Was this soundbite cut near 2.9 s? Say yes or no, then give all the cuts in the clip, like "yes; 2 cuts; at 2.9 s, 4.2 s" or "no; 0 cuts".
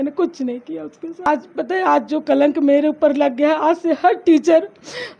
no; 1 cut; at 1.3 s